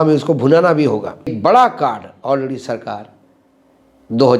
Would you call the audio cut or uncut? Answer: cut